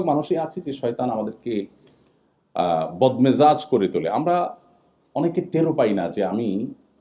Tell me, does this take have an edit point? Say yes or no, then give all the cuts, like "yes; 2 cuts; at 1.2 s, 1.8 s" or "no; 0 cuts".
no; 0 cuts